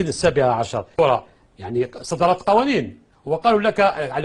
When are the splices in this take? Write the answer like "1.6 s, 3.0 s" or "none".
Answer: 1.0 s